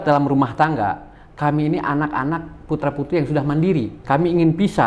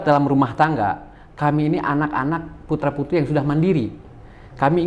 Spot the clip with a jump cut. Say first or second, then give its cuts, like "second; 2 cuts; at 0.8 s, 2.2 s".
first; 1 cut; at 3.9 s